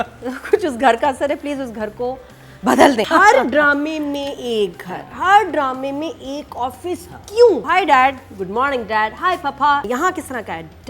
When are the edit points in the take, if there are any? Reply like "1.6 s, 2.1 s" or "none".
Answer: 3.1 s, 7.6 s, 9.8 s